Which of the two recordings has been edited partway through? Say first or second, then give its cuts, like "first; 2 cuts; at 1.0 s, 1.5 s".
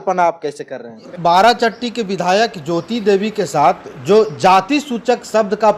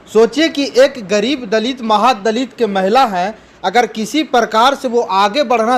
first; 1 cut; at 1.1 s